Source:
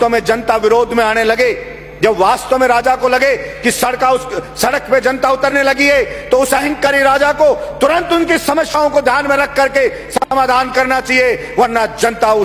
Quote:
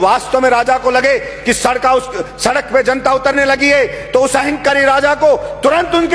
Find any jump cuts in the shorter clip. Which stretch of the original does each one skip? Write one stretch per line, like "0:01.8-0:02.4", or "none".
none

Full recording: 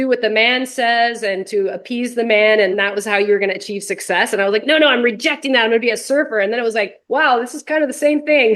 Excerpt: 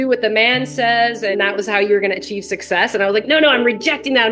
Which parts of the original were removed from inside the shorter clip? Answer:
0:01.4-0:02.7

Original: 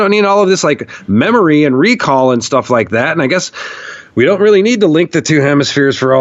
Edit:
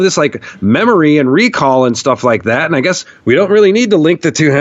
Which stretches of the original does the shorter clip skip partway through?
0:03.6-0:04.0

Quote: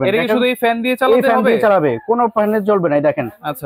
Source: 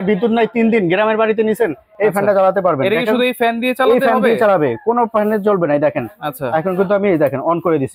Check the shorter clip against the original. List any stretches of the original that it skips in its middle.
none

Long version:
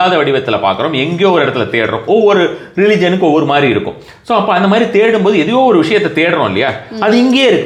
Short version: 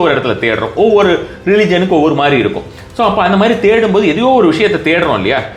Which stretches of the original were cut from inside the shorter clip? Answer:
none

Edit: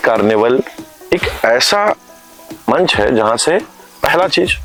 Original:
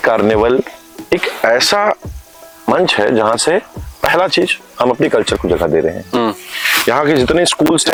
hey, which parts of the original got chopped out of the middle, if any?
none

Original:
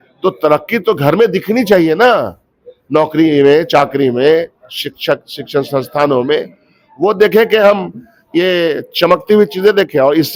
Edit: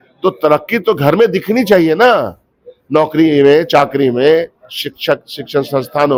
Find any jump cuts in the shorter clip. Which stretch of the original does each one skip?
none

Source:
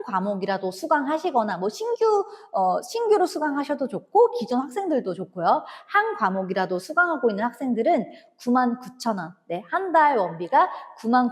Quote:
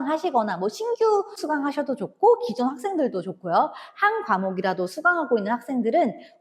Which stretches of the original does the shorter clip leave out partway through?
0:02.4-0:03.3

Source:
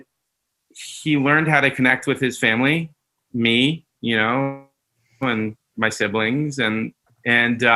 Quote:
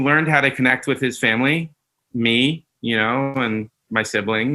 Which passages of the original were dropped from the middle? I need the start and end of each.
0:04.5-0:05.2

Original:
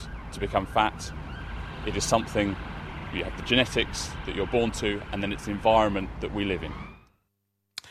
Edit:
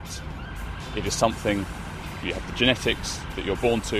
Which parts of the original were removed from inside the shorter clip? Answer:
none

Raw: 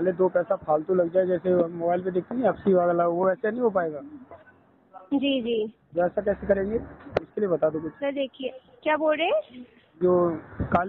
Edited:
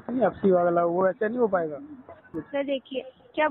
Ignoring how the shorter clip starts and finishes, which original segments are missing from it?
0:04.6-0:07.9

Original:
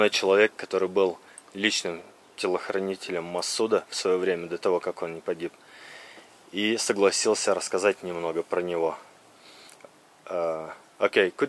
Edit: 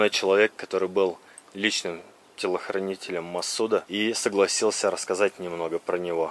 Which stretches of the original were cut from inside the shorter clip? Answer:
0:03.9-0:06.5

